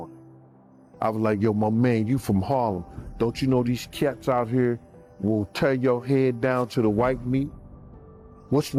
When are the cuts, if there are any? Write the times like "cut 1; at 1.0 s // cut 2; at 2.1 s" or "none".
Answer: none